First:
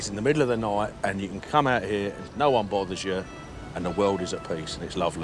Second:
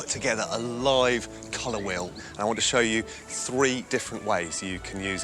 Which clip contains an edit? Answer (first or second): second